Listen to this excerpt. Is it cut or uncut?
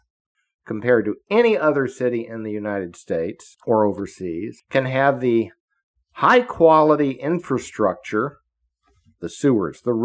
cut